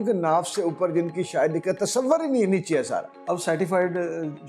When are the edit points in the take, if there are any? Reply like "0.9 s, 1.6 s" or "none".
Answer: 3.1 s